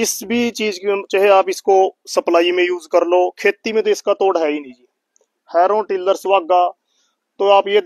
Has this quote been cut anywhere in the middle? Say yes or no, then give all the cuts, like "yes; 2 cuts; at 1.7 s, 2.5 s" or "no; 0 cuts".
no; 0 cuts